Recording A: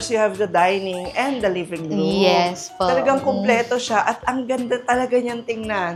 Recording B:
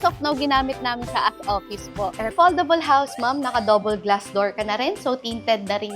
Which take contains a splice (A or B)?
B